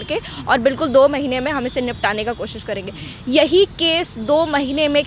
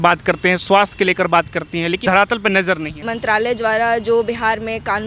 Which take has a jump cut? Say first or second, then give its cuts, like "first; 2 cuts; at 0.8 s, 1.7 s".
second; 2 cuts; at 2.0 s, 3.1 s